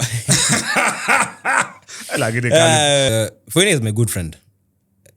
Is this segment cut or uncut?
cut